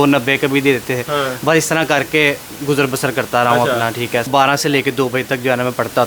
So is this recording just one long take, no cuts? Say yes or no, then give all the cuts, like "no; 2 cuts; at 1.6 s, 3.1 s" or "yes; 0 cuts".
no; 1 cut; at 4.3 s